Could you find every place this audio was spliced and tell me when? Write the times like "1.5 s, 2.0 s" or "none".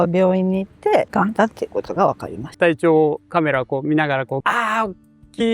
1.1 s, 2.4 s, 4.4 s